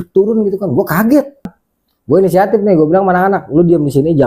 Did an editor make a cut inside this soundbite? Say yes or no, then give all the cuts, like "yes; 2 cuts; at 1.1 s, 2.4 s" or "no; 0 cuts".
yes; 1 cut; at 1.6 s